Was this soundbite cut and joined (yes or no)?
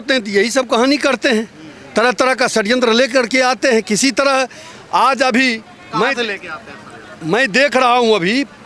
no